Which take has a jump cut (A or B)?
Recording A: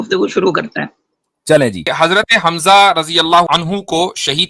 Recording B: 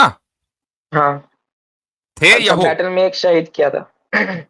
A